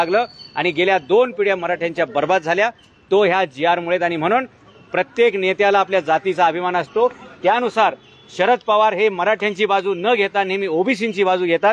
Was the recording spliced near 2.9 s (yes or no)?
no